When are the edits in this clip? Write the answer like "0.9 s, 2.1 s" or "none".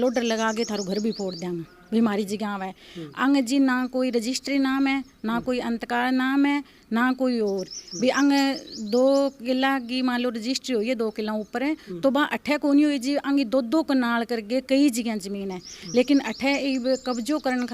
none